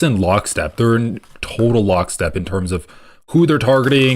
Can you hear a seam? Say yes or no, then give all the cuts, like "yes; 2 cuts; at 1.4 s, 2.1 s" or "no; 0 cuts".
no; 0 cuts